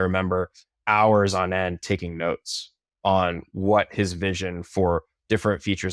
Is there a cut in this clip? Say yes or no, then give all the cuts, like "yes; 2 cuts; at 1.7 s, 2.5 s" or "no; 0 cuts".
no; 0 cuts